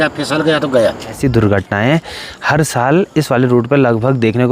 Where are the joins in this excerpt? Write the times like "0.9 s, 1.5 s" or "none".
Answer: 1.1 s